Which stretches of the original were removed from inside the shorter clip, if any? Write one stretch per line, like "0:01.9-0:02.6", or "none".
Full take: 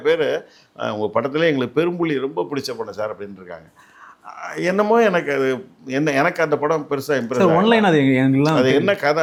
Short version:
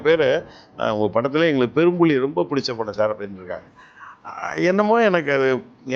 none